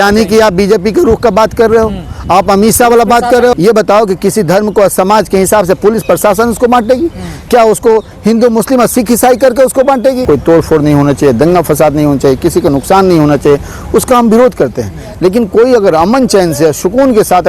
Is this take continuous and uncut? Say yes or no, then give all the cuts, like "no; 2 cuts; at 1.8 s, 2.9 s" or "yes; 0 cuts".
no; 2 cuts; at 3.6 s, 10.2 s